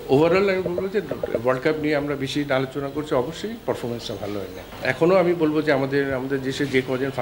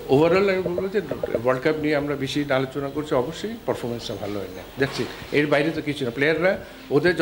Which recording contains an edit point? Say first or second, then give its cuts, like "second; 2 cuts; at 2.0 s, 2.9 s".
first; 1 cut; at 4.6 s